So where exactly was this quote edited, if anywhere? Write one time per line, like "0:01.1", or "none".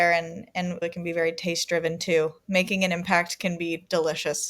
0:02.4